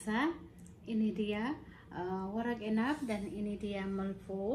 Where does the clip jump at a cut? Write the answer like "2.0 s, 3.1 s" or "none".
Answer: none